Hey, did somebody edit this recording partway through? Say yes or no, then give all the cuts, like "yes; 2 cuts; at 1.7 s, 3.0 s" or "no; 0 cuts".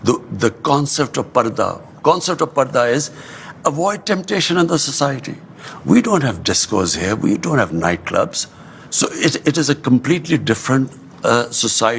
no; 0 cuts